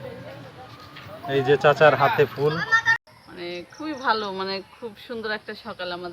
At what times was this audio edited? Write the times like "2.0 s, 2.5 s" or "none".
3.0 s